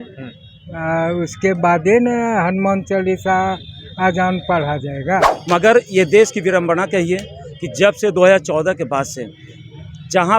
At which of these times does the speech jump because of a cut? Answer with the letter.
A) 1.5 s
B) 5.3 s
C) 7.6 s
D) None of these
B